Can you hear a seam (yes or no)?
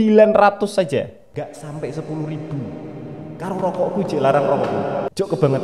no